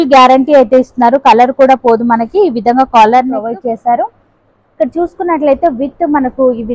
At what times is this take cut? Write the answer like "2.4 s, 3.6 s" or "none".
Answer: 3.4 s